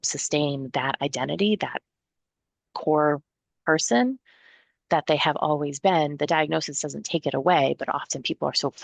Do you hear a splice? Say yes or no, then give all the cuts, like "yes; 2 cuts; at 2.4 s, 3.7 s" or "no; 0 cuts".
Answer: no; 0 cuts